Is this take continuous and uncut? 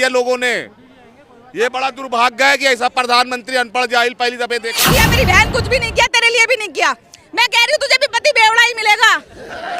no; 1 cut; at 4.7 s

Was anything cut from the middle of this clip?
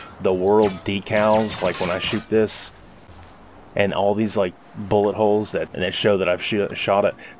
yes; 1 cut; at 5.7 s

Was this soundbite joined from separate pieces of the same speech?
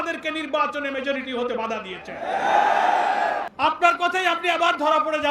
yes; 1 cut; at 3.5 s

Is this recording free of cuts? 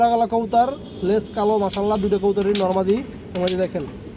yes; 0 cuts

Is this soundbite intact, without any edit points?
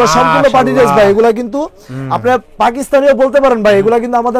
yes; 0 cuts

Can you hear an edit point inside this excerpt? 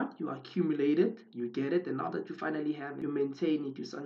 no; 0 cuts

